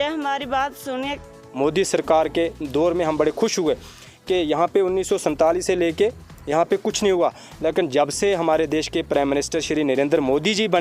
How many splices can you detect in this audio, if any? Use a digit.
1